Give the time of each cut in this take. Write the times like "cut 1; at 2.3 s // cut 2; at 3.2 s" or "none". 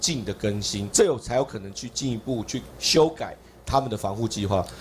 none